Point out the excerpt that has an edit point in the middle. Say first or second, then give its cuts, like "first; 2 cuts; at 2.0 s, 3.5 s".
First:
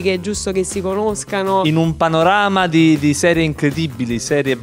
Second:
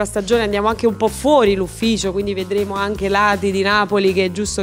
first; 1 cut; at 1.6 s